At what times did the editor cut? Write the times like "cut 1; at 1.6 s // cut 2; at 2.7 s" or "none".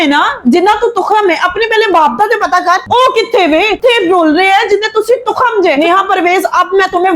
cut 1; at 5.8 s